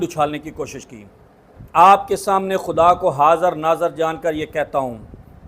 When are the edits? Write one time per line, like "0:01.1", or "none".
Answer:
0:01.6